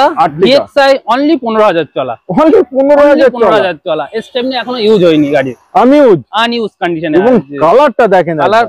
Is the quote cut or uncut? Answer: uncut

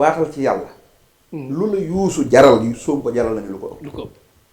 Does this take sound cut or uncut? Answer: uncut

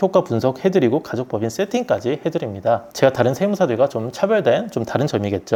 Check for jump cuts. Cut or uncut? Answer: uncut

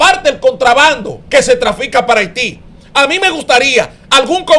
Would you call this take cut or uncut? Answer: cut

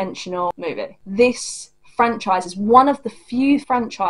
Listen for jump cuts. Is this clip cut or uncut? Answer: cut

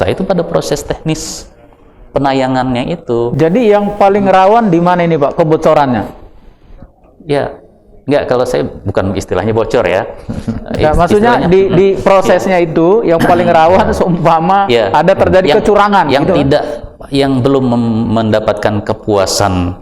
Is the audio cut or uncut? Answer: uncut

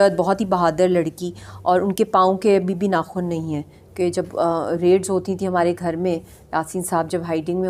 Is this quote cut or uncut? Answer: uncut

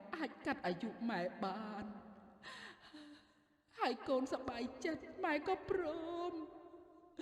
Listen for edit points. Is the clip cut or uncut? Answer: uncut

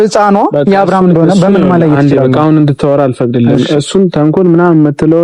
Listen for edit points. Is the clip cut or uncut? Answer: uncut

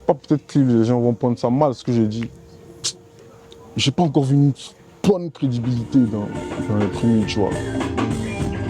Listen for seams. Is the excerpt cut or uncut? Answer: cut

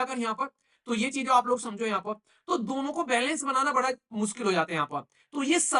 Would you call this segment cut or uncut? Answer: uncut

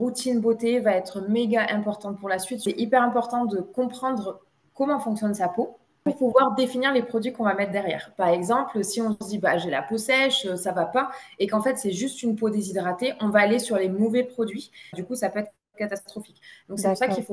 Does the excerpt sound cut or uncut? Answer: cut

